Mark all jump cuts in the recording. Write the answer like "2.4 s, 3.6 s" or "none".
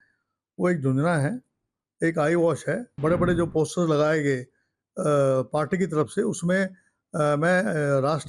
2.9 s